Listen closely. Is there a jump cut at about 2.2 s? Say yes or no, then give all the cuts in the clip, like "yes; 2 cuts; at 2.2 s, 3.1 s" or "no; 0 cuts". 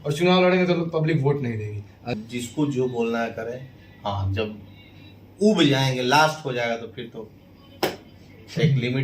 yes; 1 cut; at 2.2 s